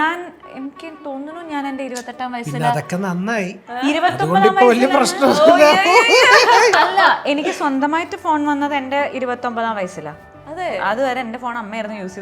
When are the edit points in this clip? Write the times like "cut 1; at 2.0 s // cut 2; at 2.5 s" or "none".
none